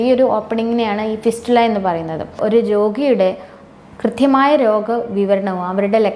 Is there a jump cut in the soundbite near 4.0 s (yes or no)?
no